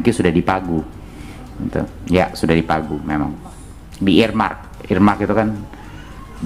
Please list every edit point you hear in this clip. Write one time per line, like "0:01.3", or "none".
none